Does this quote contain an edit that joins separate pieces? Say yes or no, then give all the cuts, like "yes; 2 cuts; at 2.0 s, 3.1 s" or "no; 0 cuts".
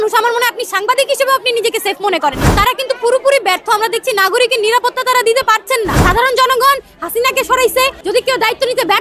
yes; 3 cuts; at 2.5 s, 6.0 s, 8.0 s